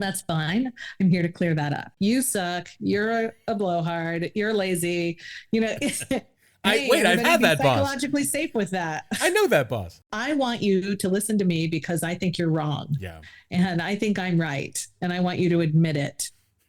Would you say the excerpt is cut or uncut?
cut